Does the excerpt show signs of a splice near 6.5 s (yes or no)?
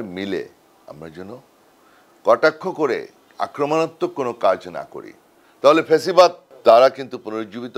yes